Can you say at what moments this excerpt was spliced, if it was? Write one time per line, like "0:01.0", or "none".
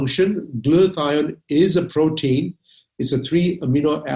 none